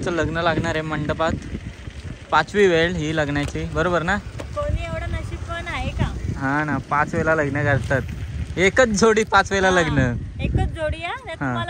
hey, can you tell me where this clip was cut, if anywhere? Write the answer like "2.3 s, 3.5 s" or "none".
none